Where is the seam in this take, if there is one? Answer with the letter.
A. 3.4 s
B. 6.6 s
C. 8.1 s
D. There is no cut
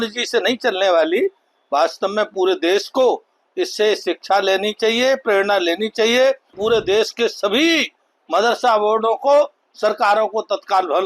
B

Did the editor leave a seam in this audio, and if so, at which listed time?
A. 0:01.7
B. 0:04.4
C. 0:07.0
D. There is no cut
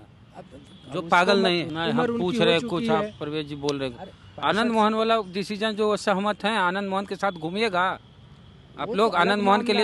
A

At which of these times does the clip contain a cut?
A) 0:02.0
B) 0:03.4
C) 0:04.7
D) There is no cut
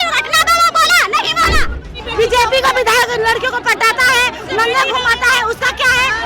A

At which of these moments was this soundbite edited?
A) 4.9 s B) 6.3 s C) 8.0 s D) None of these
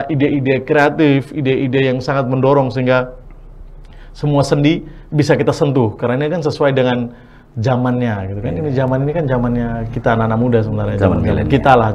D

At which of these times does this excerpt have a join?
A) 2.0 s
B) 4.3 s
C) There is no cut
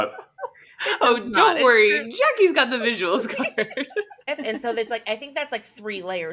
B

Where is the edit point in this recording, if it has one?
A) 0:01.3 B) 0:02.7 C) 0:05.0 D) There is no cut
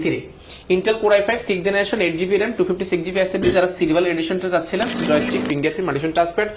C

